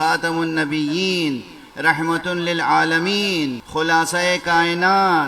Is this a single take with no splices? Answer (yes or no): no